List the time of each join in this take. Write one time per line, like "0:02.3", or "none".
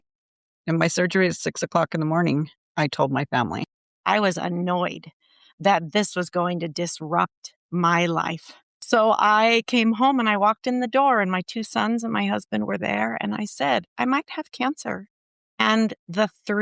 0:03.7
0:08.7